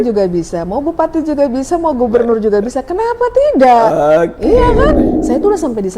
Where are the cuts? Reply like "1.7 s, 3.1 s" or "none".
5.1 s